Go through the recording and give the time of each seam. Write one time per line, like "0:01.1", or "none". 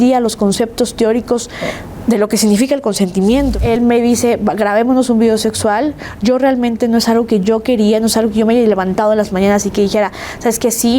0:03.5